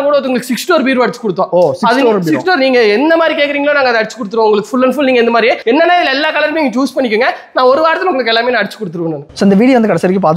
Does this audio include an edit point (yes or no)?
no